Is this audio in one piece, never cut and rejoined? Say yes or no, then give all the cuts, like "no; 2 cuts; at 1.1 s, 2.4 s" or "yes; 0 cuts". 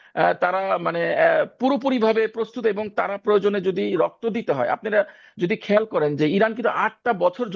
yes; 0 cuts